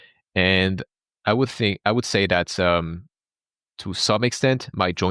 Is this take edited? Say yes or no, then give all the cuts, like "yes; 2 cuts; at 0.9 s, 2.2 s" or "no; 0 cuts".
no; 0 cuts